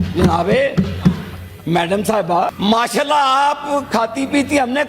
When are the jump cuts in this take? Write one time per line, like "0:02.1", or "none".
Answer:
0:02.5